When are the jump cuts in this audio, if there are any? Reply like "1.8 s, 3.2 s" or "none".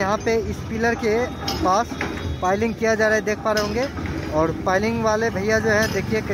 none